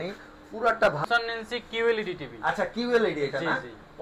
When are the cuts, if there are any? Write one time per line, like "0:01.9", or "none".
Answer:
0:01.0

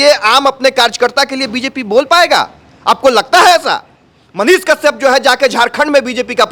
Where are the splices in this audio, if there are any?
none

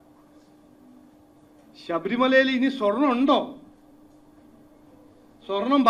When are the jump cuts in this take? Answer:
none

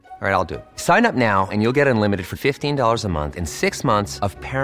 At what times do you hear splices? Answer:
none

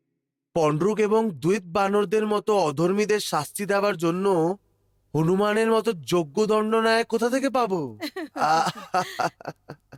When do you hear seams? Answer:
none

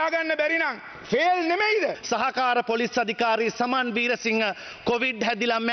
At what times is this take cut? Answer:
0:02.0

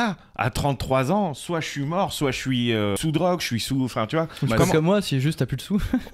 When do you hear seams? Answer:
0:03.0

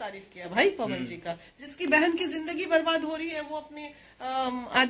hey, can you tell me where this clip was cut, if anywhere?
none

